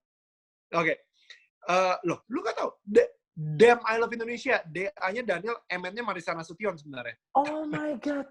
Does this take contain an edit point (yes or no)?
no